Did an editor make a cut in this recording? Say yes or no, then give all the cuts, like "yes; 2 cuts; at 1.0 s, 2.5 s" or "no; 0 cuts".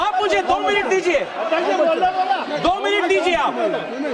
no; 0 cuts